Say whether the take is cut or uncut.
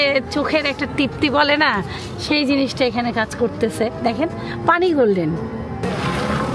uncut